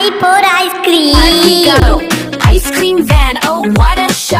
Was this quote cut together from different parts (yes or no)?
yes